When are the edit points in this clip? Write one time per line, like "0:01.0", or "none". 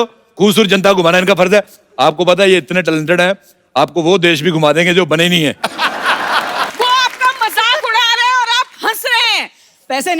0:06.7